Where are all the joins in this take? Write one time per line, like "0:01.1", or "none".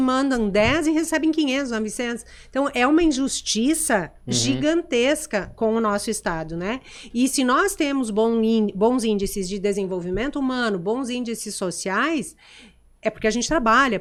none